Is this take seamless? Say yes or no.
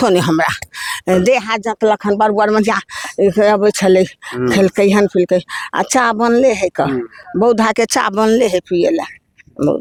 yes